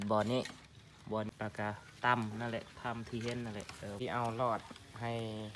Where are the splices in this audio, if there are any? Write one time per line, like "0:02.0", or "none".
0:01.3
0:04.0